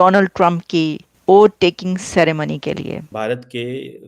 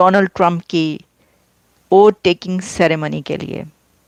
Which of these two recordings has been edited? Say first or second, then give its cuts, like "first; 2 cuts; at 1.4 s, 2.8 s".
first; 2 cuts; at 1.1 s, 3.1 s